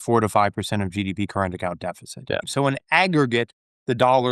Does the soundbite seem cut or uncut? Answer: cut